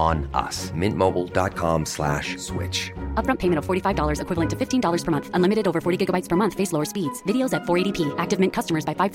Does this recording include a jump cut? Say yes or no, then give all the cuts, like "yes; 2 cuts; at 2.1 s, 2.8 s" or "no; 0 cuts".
no; 0 cuts